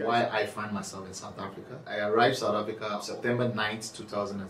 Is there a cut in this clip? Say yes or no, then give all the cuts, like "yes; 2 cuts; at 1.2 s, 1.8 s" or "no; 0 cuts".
yes; 2 cuts; at 1.9 s, 3.1 s